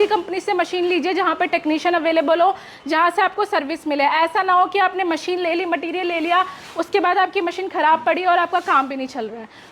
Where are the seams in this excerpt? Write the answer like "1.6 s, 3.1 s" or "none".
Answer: none